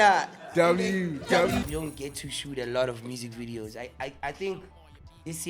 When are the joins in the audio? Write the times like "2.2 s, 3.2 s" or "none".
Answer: 1.6 s